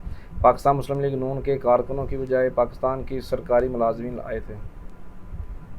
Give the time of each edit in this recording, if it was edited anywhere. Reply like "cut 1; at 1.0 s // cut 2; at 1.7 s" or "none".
none

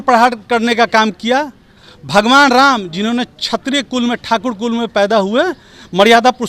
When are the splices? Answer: none

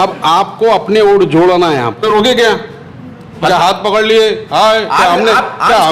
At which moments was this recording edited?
cut 1; at 2.0 s

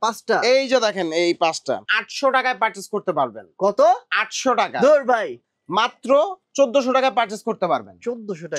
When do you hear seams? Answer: cut 1; at 1.9 s // cut 2; at 5.3 s

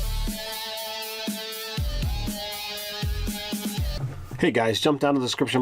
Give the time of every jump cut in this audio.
cut 1; at 3.9 s

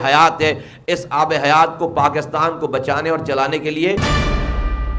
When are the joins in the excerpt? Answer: cut 1; at 4.0 s

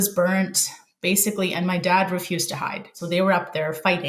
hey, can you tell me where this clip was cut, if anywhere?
cut 1; at 2.9 s

